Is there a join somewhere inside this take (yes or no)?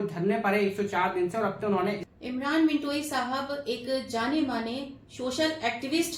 yes